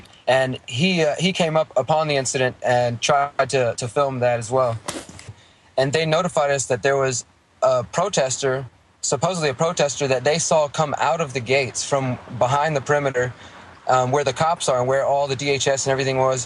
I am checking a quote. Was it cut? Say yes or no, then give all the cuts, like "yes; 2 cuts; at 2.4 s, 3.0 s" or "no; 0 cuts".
no; 0 cuts